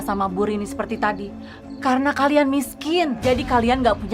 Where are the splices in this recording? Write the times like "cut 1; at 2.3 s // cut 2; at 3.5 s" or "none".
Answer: none